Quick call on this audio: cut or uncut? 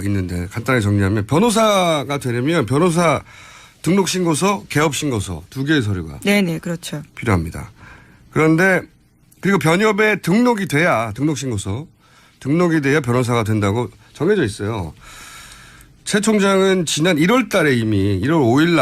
cut